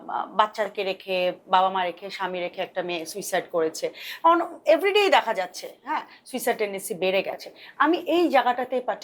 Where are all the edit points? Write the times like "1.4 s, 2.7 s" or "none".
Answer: none